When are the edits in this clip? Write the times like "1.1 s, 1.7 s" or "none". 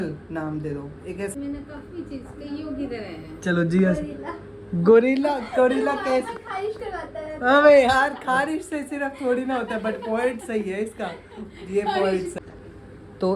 1.3 s, 12.3 s